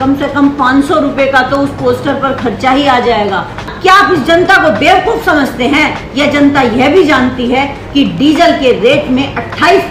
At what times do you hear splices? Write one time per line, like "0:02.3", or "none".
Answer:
0:03.7